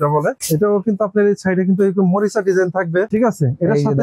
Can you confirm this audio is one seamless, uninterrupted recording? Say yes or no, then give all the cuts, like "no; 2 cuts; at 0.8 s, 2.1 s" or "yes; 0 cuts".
yes; 0 cuts